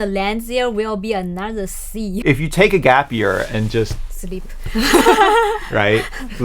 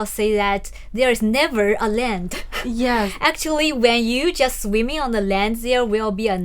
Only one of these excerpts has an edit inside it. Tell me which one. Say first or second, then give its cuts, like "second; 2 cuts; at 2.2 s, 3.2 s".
first; 1 cut; at 2.2 s